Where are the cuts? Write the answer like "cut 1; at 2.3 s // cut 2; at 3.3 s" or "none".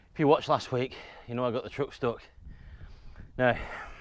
none